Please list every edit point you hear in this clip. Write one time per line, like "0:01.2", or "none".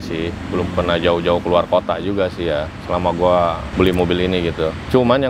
0:03.6